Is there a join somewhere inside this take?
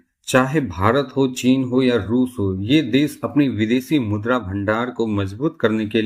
no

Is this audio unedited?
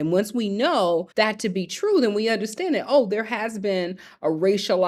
no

